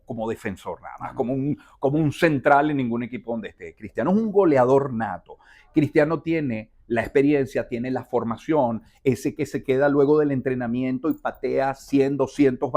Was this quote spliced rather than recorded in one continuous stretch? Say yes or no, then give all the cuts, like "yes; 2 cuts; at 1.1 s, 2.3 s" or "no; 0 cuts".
no; 0 cuts